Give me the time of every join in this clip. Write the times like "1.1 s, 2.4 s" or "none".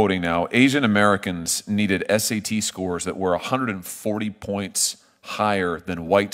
none